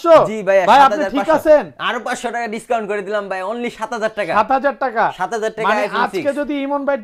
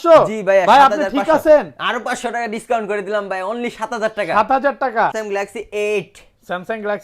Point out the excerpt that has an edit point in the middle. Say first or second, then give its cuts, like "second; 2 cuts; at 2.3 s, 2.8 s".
second; 1 cut; at 5.1 s